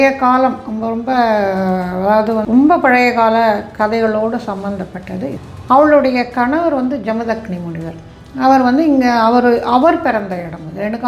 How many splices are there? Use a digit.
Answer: 2